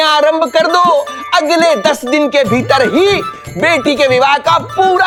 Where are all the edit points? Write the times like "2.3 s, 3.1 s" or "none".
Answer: none